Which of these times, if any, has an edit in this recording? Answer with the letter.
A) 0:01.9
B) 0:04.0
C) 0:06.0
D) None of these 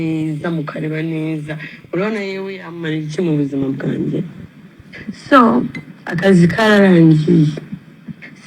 D